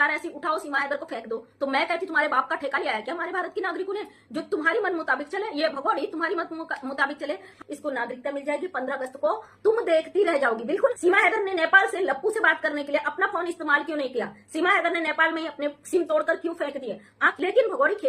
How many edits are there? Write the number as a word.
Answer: three